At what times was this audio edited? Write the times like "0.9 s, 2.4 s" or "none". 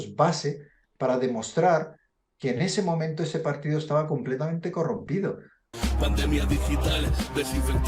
5.7 s